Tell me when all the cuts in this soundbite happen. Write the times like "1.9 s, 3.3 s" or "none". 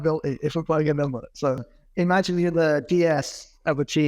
1.6 s